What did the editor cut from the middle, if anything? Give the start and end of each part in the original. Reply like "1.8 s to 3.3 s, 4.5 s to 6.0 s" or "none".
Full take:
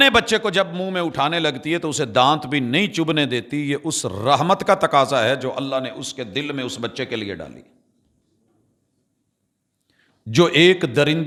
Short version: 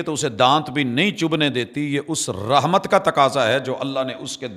none